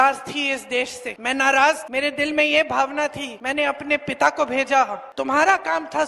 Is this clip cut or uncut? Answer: cut